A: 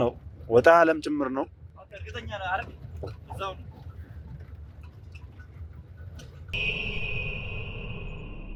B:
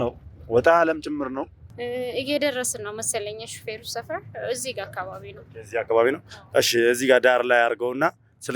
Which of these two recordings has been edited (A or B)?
B